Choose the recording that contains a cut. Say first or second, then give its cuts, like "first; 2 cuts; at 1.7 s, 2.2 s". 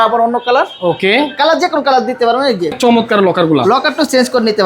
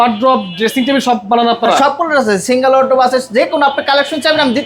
first; 1 cut; at 2.8 s